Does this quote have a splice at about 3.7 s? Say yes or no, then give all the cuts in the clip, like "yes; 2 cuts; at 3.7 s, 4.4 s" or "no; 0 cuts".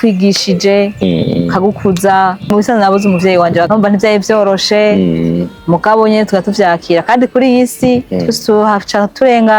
yes; 2 cuts; at 2.5 s, 3.7 s